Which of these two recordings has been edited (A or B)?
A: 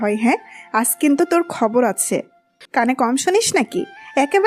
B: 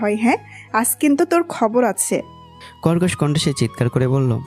A